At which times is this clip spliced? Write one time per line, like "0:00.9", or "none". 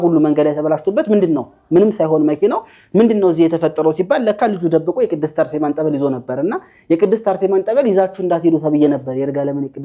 none